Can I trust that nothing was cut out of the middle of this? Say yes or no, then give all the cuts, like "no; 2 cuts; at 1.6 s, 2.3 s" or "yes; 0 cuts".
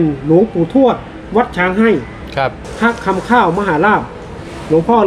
no; 1 cut; at 2.6 s